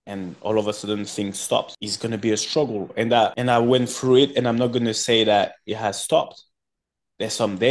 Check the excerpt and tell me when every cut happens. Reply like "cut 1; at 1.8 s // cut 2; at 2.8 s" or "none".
cut 1; at 1.7 s // cut 2; at 3.4 s